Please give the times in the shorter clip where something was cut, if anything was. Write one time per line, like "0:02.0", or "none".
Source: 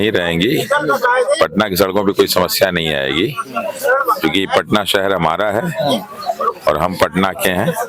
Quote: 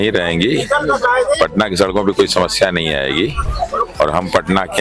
0:03.4